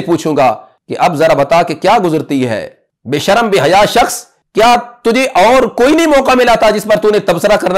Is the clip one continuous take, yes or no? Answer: yes